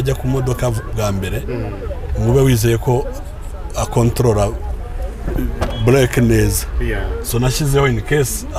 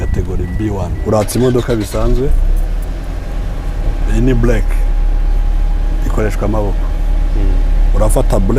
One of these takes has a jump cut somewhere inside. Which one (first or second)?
second